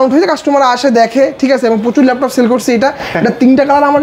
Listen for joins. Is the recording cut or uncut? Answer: uncut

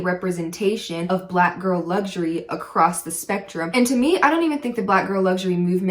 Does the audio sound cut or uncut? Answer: cut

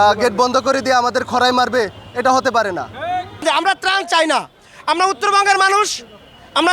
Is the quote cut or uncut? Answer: cut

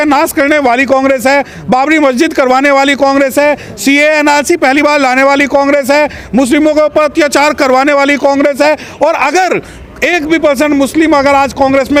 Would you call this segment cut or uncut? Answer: uncut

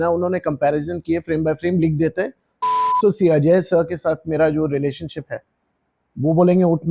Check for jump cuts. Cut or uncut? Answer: cut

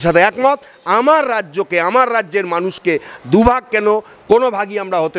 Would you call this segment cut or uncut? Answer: uncut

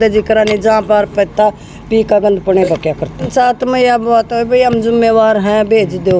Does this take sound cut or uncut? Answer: cut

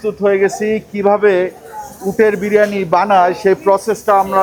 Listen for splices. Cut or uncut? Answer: uncut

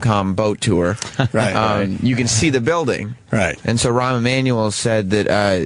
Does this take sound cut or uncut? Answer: cut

